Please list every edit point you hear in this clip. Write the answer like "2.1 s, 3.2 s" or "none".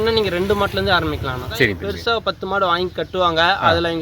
2.2 s